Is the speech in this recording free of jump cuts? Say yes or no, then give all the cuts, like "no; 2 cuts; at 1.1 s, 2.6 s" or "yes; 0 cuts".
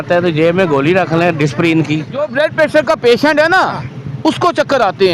no; 1 cut; at 2.3 s